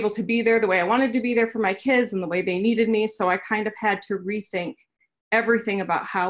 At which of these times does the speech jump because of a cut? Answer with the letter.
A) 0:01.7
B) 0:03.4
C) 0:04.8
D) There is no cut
D